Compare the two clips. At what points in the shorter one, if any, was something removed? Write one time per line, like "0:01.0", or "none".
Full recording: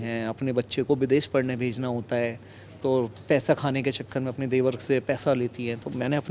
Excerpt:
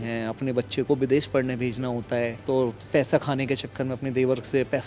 0:02.4